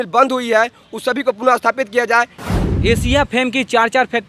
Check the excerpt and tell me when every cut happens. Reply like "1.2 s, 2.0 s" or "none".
2.4 s